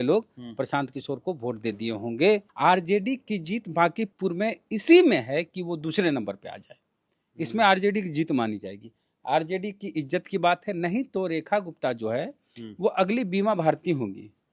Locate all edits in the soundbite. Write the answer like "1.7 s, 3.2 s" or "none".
2.5 s, 4.1 s